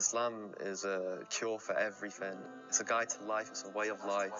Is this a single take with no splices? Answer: no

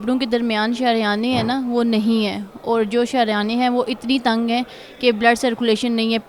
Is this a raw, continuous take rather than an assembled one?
yes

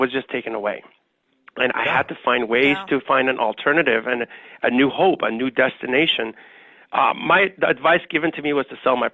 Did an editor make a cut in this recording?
no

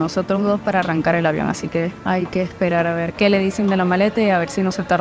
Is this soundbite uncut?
no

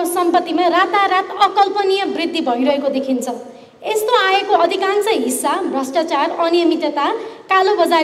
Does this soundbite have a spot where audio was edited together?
no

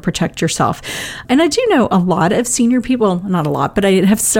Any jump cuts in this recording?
yes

